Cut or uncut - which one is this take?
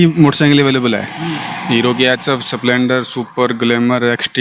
uncut